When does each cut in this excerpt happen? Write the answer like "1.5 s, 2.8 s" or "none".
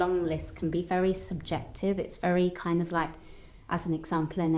none